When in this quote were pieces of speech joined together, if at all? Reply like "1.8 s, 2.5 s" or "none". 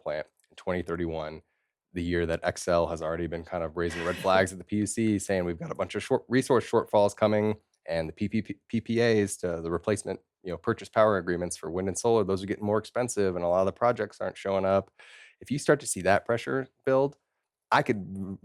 none